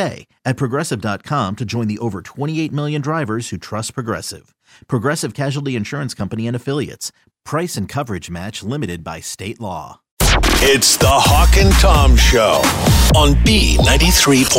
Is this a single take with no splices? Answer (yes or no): no